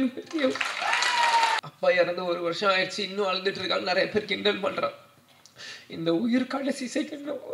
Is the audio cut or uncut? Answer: cut